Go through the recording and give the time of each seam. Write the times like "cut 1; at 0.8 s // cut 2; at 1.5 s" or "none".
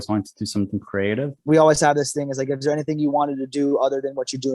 cut 1; at 1.3 s